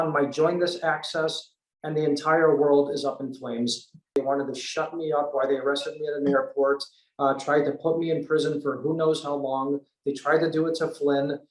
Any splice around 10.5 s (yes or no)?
no